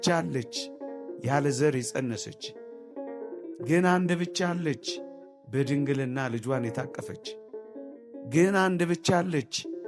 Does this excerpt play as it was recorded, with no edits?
yes; 0 cuts

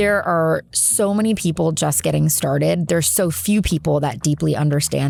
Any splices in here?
no; 0 cuts

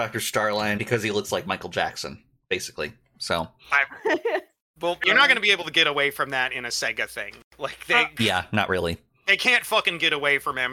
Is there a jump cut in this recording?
yes; 3 cuts; at 0.8 s, 5.0 s, 9.2 s

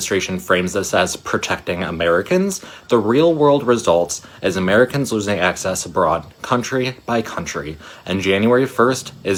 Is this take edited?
no; 0 cuts

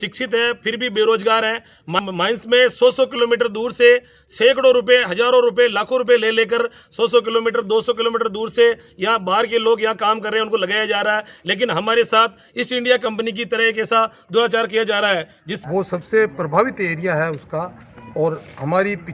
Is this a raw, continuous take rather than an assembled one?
no; 2 cuts; at 2.0 s, 15.4 s

